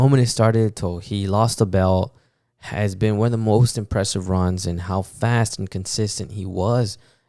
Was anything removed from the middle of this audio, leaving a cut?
no; 0 cuts

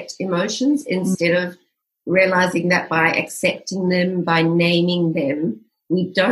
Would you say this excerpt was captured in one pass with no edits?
yes; 0 cuts

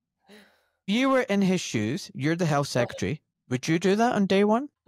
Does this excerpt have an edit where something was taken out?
yes; 1 cut; at 3.3 s

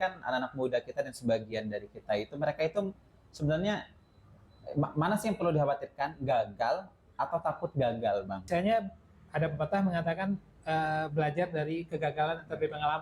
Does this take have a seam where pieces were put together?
yes; 1 cut; at 8.4 s

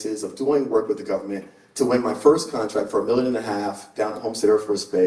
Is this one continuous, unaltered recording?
yes; 0 cuts

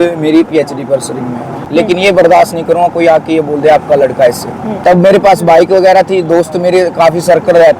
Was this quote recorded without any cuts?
no; 2 cuts; at 1.5 s, 4.7 s

